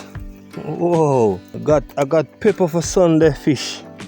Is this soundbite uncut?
no; 1 cut; at 1.5 s

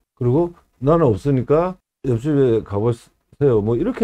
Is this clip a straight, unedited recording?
no; 1 cut; at 1.9 s

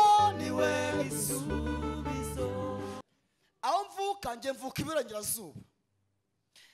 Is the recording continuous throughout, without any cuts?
no; 1 cut; at 3.0 s

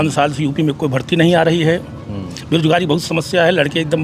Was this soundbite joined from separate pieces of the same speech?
no; 0 cuts

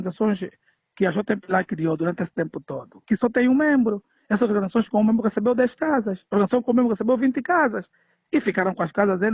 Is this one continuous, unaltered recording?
yes; 0 cuts

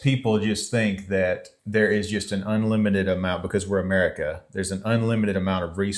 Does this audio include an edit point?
yes; 1 cut; at 1.5 s

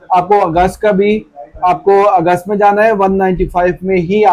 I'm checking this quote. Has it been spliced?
no; 0 cuts

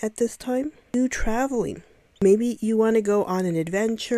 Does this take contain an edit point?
yes; 2 cuts; at 0.9 s, 2.2 s

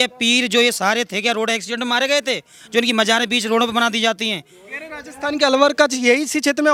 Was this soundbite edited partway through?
no; 0 cuts

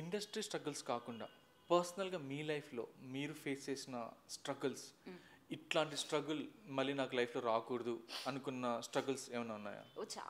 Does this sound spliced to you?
no; 0 cuts

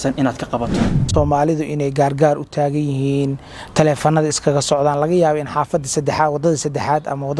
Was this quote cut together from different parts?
yes; 1 cut; at 1.1 s

